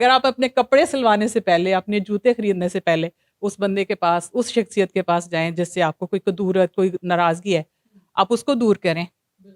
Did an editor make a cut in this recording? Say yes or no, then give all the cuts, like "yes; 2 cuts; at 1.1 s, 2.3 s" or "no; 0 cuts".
no; 0 cuts